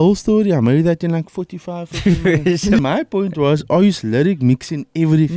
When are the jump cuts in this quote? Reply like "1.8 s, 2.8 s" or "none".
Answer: 2.8 s